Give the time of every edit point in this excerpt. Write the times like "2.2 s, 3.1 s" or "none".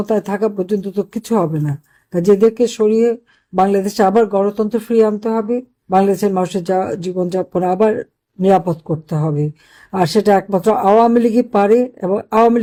none